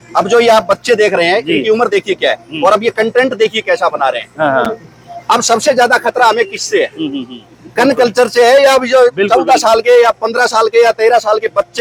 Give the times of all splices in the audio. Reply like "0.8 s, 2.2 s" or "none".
none